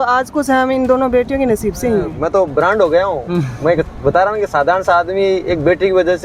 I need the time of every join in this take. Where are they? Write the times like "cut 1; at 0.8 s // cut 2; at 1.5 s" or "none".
cut 1; at 2.2 s

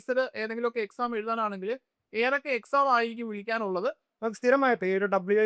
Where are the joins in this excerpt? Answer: cut 1; at 4.1 s

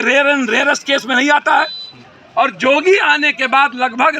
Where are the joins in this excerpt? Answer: cut 1; at 2.2 s

